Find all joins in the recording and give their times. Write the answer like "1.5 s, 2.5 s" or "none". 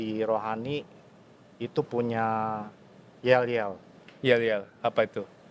none